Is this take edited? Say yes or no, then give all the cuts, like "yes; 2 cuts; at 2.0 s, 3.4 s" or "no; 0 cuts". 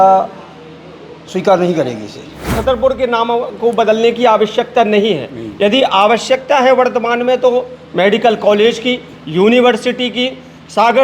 yes; 1 cut; at 2.6 s